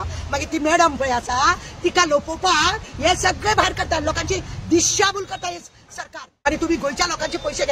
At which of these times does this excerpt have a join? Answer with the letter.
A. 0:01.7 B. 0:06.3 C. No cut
B